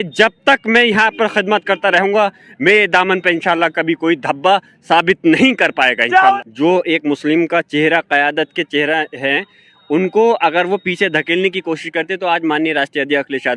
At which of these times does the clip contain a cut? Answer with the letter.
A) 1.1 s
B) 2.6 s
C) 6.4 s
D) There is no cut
C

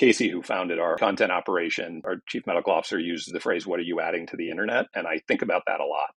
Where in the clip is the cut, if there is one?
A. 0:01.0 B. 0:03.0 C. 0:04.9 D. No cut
A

